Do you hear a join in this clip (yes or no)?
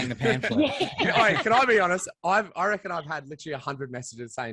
no